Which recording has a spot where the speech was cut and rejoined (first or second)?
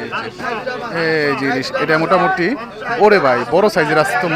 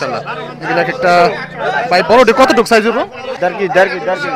second